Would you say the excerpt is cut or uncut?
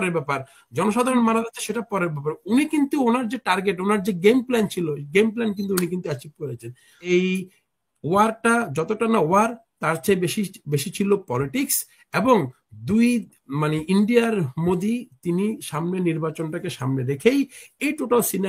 cut